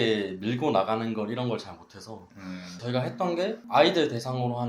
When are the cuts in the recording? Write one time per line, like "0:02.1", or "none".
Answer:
0:02.8